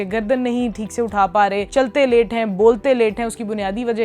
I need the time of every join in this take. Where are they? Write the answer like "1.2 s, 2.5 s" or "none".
1.7 s